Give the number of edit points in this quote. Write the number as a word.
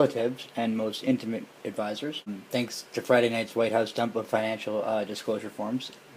one